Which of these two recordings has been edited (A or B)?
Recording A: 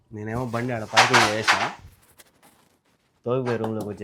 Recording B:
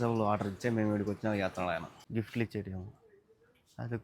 B